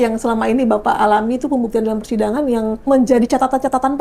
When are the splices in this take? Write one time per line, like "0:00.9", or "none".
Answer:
0:02.9